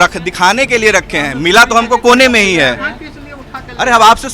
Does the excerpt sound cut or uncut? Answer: uncut